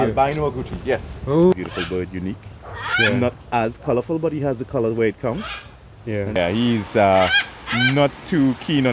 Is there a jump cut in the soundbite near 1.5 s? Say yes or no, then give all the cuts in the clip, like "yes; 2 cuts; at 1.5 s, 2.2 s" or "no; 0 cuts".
yes; 2 cuts; at 1.5 s, 6.4 s